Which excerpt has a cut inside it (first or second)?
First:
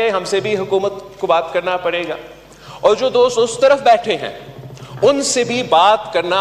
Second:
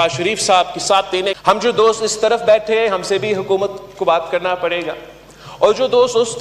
second